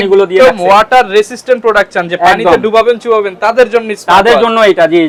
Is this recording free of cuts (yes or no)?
yes